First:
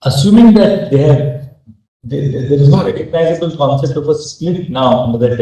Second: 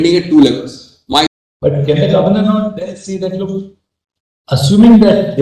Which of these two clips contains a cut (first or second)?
second